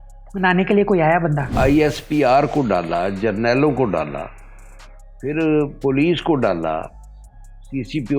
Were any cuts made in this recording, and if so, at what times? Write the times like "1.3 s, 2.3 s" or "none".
1.5 s